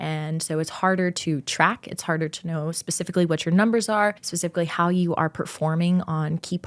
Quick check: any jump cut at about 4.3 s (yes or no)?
yes